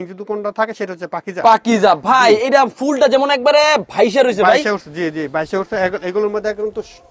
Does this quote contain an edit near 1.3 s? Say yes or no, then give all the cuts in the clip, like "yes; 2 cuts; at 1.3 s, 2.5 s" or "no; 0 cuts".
no; 0 cuts